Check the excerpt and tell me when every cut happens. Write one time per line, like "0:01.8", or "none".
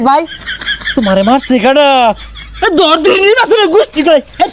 none